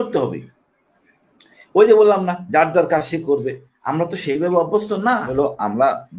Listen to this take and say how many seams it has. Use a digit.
1